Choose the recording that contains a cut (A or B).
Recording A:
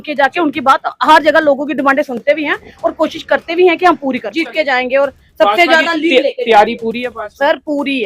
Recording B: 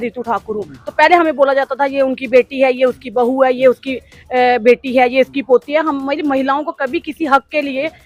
A